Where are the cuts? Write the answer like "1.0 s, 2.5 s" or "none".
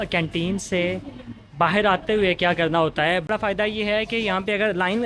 3.3 s